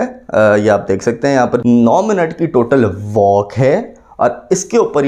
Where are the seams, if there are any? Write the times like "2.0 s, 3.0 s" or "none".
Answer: 1.6 s